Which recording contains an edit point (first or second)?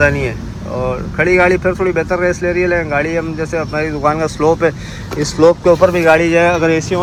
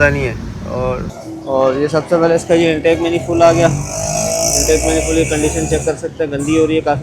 second